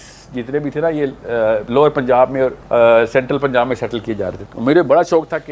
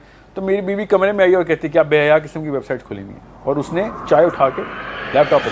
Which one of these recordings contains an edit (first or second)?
first